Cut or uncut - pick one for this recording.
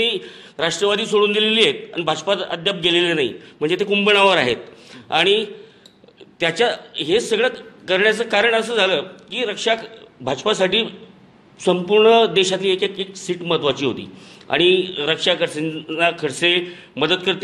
uncut